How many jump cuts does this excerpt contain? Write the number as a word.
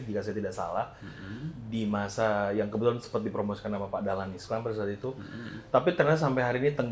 zero